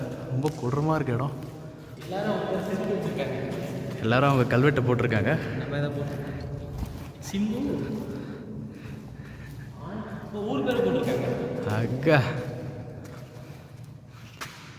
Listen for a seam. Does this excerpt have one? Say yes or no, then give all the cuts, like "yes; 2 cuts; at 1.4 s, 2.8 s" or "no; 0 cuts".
no; 0 cuts